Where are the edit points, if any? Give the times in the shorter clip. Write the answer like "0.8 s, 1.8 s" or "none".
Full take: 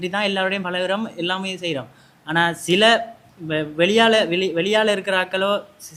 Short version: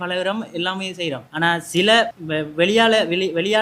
1.3 s, 2.2 s